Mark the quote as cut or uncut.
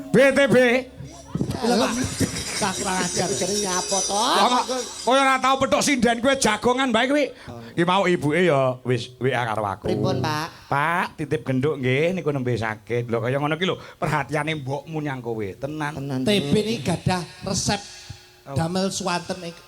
cut